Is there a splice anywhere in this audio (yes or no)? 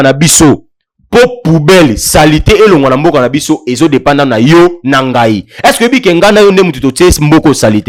no